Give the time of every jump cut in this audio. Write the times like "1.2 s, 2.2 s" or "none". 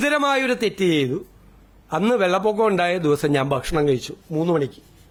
none